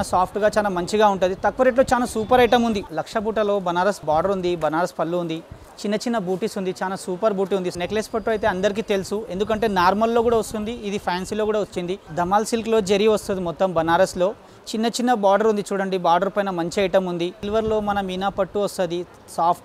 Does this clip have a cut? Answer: yes; 5 cuts; at 2.9 s, 4.0 s, 7.7 s, 12.0 s, 17.4 s

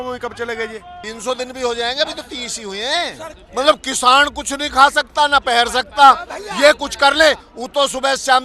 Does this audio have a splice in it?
yes; 3 cuts; at 1.0 s, 3.3 s, 7.5 s

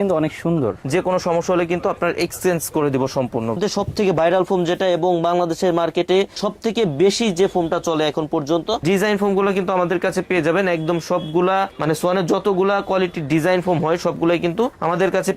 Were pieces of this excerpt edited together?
yes; 3 cuts; at 0.8 s, 3.6 s, 8.8 s

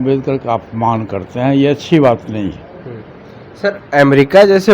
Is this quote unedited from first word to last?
yes; 0 cuts

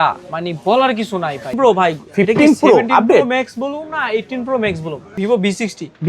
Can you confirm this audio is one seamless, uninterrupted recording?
no; 2 cuts; at 1.5 s, 5.1 s

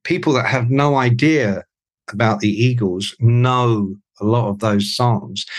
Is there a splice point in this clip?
no; 0 cuts

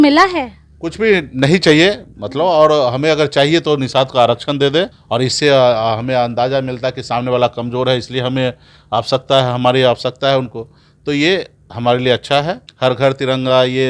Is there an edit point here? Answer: yes; 2 cuts; at 5.0 s, 12.6 s

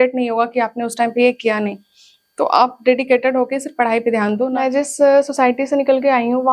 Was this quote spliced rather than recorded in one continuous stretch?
yes; 1 cut; at 4.5 s

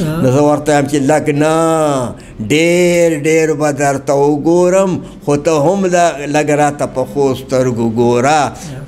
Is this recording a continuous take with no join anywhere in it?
yes; 0 cuts

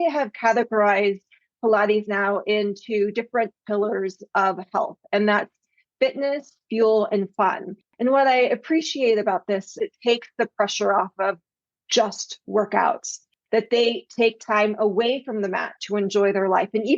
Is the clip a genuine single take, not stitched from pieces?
no; 1 cut; at 9.7 s

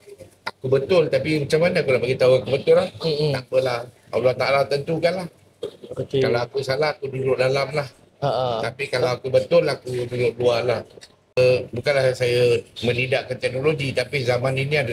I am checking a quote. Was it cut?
yes; 1 cut; at 11.4 s

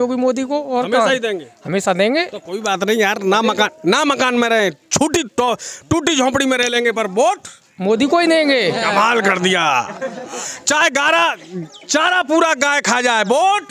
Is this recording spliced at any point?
no; 0 cuts

